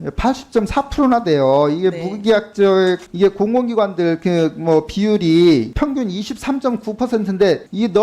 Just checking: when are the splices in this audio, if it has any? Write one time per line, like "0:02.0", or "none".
0:05.7